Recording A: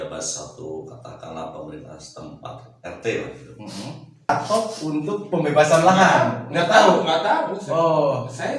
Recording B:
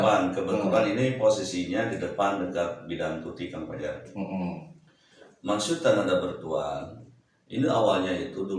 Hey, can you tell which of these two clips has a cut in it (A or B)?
A